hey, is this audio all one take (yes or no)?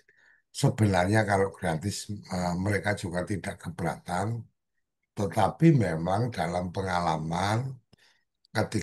yes